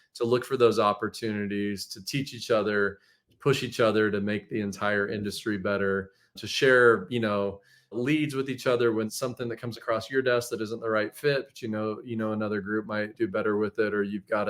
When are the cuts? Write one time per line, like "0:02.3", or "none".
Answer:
0:06.4
0:08.0
0:09.1
0:13.1